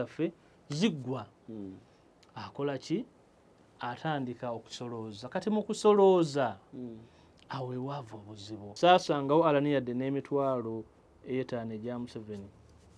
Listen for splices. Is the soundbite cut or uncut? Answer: cut